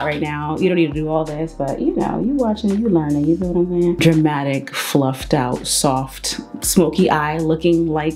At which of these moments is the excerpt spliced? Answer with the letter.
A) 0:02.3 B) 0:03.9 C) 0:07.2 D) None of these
B